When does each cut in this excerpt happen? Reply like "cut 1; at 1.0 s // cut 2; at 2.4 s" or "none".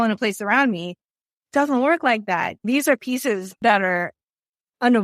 cut 1; at 2.6 s // cut 2; at 3.6 s